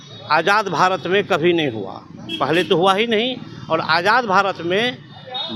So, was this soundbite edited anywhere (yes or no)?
no